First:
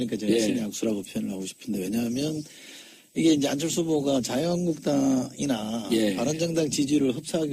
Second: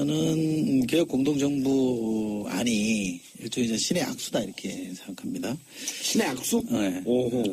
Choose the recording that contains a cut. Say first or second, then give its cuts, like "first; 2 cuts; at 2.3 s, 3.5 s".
second; 1 cut; at 4.5 s